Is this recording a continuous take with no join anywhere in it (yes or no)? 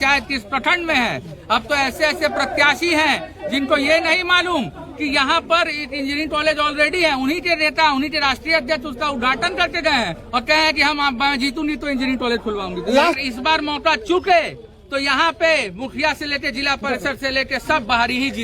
no